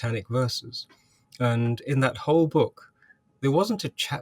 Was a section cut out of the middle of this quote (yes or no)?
no